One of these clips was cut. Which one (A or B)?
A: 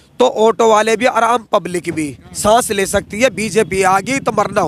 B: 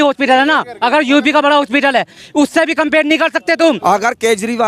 B